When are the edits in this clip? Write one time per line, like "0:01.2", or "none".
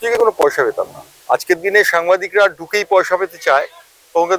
none